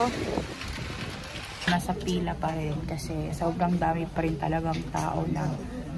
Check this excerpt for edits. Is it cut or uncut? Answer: cut